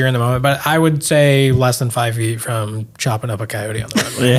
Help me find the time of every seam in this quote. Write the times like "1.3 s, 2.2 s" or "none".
none